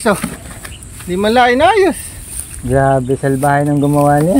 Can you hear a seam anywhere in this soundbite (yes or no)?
no